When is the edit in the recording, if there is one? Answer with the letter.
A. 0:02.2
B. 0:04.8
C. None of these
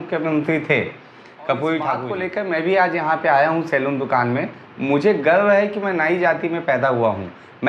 A